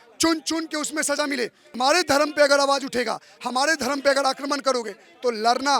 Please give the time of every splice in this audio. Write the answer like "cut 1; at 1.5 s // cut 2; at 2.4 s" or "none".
cut 1; at 1.6 s